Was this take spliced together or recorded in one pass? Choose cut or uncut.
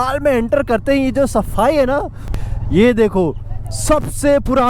cut